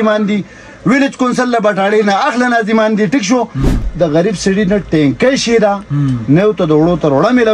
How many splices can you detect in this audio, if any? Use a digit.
1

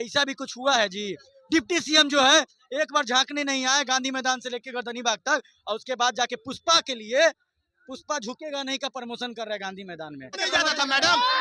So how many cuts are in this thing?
1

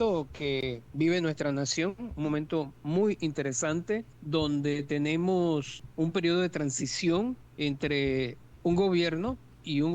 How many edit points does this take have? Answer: 4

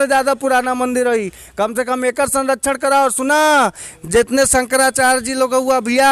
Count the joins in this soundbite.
0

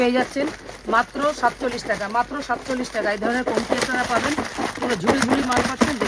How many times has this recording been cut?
0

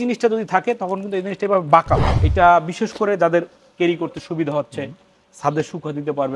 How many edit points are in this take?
1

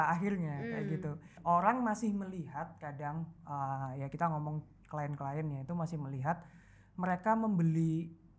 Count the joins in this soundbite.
1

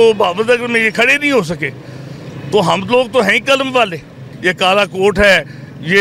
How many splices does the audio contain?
0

